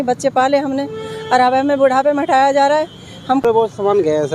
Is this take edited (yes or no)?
yes